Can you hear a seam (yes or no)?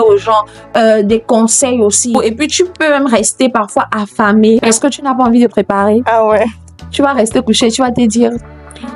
yes